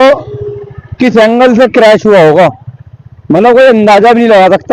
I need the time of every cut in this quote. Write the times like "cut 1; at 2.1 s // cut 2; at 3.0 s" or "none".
none